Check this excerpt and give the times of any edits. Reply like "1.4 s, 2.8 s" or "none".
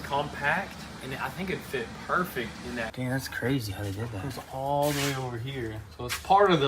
2.9 s